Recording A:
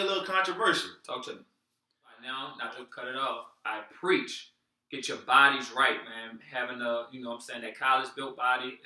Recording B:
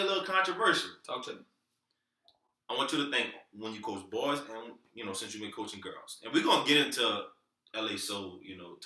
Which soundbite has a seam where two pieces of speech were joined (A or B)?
A